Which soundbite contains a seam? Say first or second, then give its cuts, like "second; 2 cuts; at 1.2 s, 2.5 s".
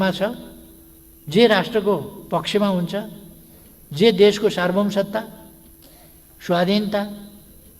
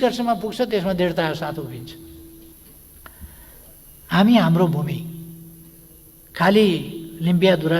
second; 1 cut; at 2.5 s